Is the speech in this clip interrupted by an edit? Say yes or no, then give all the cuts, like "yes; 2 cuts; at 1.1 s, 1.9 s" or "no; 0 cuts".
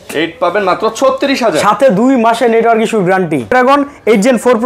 yes; 1 cut; at 3.5 s